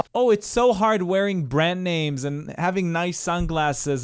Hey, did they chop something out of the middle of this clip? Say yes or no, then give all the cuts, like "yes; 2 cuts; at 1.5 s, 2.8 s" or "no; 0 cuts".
no; 0 cuts